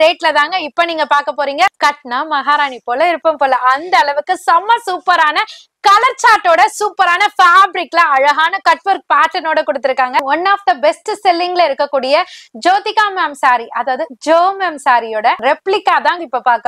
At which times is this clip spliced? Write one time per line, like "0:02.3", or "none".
0:01.7
0:10.2
0:15.4